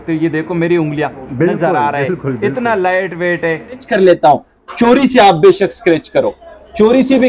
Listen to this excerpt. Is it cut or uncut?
cut